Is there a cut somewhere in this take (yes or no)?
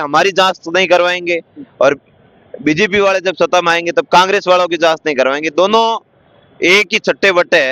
no